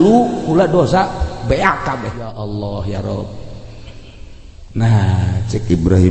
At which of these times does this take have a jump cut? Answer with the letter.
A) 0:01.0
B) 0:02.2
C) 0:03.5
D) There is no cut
B